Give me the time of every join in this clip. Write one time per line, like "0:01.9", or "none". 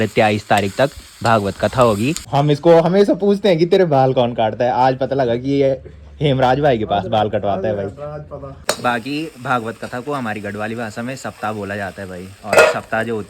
0:02.2
0:08.6